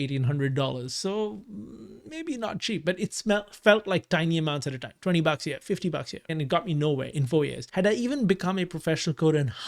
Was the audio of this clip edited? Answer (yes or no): yes